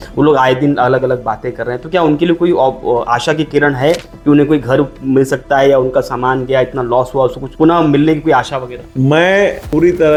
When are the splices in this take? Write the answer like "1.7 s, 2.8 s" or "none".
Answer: none